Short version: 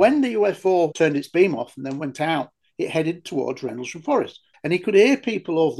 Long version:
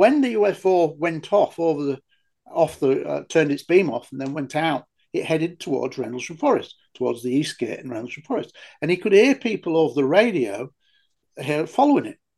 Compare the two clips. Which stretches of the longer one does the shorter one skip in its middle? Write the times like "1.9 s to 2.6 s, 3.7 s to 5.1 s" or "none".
0.9 s to 3.3 s, 6.8 s to 8.6 s

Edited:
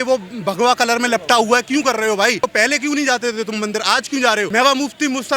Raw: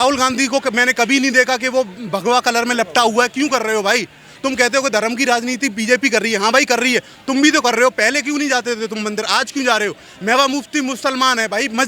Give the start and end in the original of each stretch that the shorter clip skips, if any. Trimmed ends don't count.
4.1 s to 7.9 s, 9.9 s to 10.2 s

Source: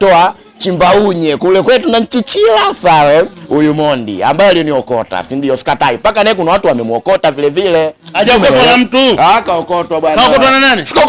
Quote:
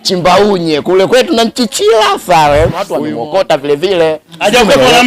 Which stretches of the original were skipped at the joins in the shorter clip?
3.4 s to 6.6 s

